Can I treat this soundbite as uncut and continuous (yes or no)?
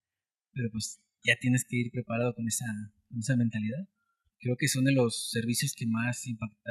no